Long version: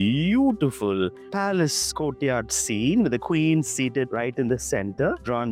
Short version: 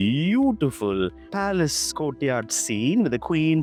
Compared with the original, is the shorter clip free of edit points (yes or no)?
yes